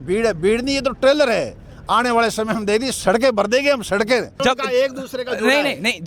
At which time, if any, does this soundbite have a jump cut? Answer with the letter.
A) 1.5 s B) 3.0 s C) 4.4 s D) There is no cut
C